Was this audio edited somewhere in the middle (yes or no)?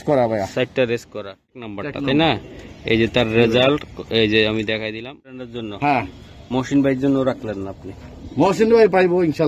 yes